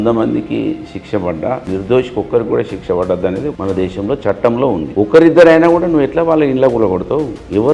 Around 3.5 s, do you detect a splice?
yes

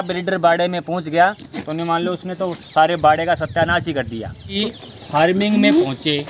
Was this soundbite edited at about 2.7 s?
no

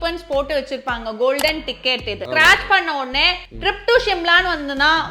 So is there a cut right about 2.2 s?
yes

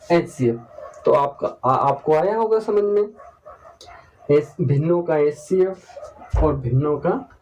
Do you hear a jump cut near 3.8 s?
no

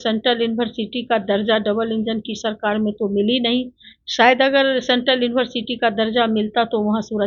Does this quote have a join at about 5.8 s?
no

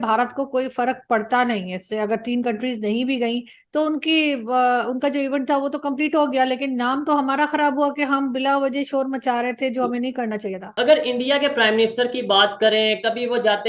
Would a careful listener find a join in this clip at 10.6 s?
yes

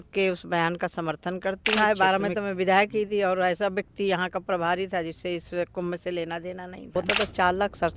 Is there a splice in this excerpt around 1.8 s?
yes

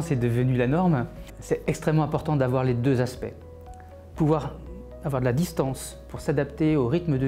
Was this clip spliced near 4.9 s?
no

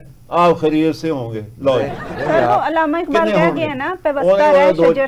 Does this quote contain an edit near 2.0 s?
no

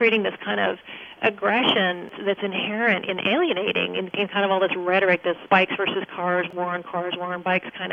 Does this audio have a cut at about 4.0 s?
no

